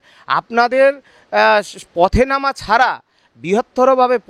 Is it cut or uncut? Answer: uncut